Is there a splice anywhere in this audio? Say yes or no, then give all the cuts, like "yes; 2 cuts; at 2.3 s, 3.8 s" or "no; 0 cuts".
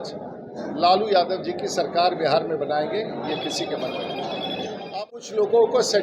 yes; 1 cut; at 4.9 s